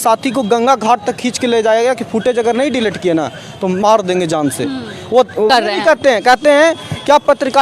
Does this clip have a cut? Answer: yes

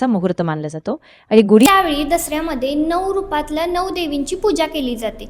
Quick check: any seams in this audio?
yes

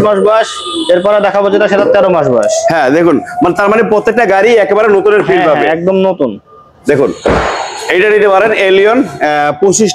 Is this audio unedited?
yes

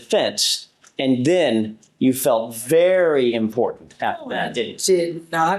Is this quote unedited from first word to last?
yes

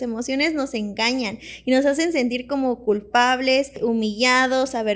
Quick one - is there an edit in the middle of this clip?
yes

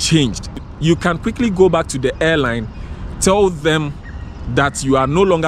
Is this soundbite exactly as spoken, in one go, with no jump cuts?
yes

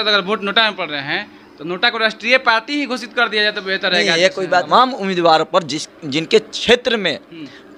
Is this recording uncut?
no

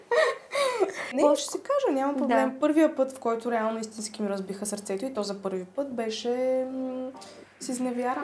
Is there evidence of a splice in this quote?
yes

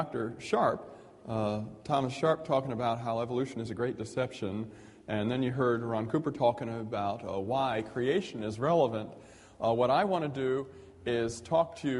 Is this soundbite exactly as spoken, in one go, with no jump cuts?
yes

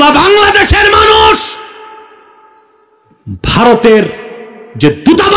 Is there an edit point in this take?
no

